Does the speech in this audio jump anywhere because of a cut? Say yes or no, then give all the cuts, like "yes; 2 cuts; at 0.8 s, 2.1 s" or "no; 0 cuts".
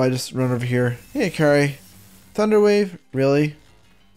yes; 1 cut; at 1.0 s